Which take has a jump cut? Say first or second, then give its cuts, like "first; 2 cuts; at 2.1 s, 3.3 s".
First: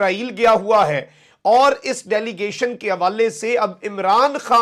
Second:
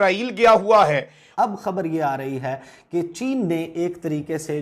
second; 1 cut; at 1.2 s